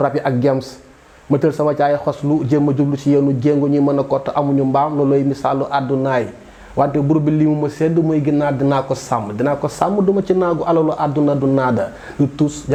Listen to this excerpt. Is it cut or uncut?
uncut